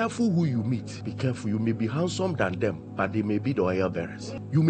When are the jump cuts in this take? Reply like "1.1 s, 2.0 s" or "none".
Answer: none